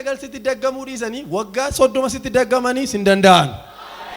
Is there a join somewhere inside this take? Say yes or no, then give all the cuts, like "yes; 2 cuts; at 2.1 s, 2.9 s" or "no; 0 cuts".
no; 0 cuts